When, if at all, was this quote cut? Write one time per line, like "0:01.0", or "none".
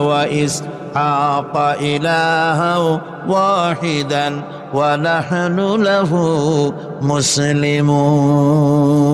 none